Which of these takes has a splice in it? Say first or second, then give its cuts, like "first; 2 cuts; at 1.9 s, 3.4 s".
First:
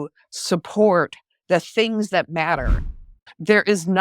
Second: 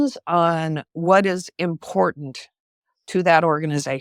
first; 1 cut; at 2.8 s